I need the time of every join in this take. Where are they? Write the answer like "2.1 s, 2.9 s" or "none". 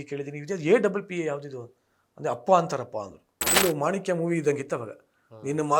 3.4 s